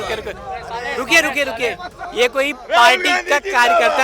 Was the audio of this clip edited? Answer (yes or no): no